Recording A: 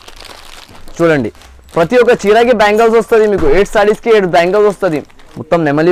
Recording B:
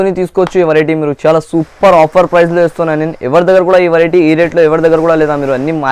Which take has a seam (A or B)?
A